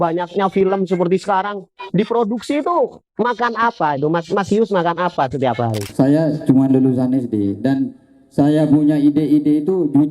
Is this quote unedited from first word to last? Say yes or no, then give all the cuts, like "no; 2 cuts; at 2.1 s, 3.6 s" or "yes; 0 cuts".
no; 1 cut; at 5.9 s